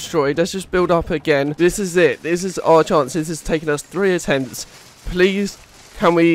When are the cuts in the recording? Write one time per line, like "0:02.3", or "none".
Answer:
0:01.5